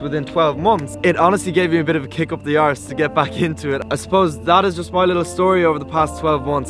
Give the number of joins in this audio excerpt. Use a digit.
0